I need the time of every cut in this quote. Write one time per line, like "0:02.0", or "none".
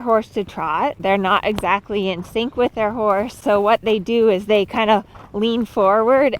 0:01.0
0:03.4